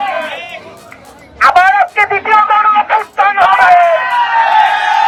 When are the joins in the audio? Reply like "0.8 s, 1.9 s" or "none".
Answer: none